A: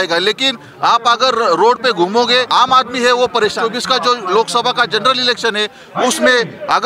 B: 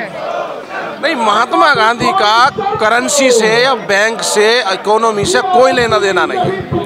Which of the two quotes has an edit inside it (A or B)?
A